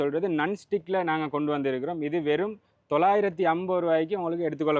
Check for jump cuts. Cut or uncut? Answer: uncut